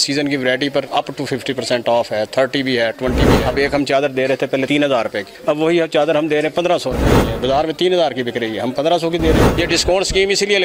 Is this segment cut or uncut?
cut